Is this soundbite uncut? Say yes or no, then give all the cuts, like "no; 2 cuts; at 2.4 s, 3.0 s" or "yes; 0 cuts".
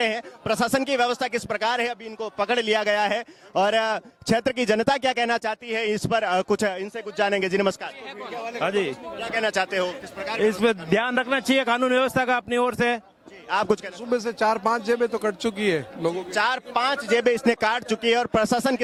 yes; 0 cuts